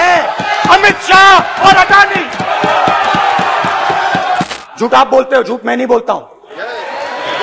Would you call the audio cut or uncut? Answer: cut